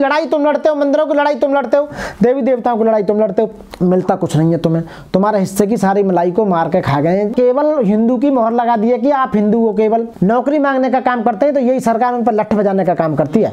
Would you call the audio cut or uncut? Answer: cut